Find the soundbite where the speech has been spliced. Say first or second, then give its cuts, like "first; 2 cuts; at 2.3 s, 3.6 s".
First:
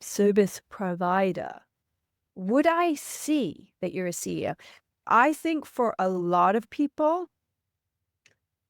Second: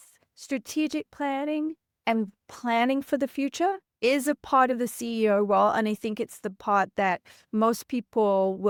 first; 1 cut; at 5.1 s